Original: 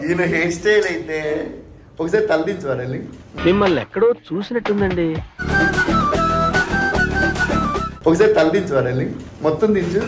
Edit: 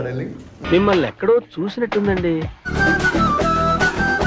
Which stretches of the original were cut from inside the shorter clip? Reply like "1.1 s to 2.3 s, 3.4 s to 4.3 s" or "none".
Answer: none